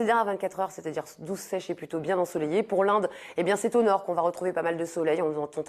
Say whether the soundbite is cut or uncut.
cut